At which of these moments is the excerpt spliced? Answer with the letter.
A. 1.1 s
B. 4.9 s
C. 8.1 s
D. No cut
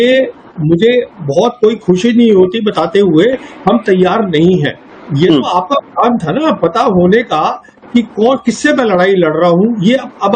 B